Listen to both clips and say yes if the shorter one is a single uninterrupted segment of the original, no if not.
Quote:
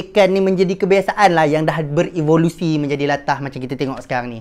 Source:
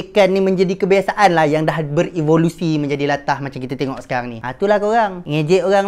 yes